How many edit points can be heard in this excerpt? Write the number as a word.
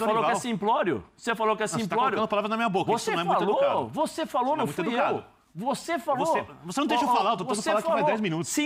zero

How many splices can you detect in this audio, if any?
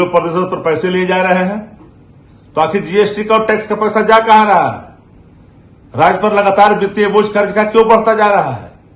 zero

